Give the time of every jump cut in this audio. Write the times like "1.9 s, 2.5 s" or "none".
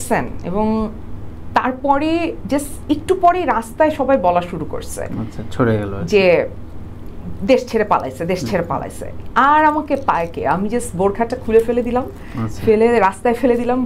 none